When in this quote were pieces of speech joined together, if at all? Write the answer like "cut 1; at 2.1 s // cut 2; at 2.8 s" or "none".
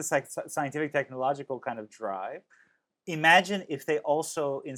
none